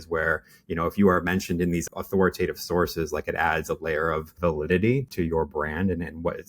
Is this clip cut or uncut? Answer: cut